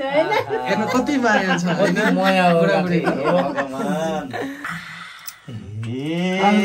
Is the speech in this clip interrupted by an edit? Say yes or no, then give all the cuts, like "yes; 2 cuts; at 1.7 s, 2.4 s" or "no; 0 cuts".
yes; 1 cut; at 4.6 s